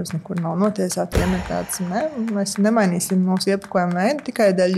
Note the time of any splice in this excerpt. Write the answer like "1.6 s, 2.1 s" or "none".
1.1 s